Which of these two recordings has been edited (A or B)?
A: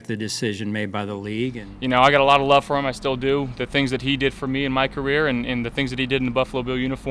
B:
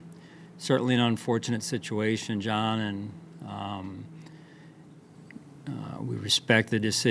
A